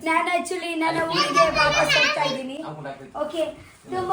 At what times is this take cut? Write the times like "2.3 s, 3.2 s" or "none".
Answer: none